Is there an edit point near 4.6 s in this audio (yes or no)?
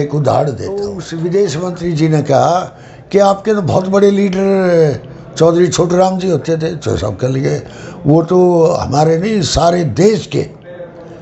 no